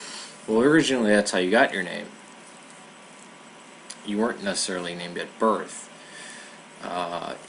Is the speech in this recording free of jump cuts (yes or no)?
no